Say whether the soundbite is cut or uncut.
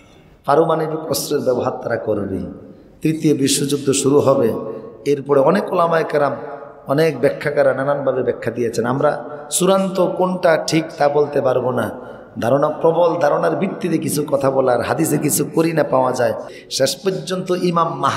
cut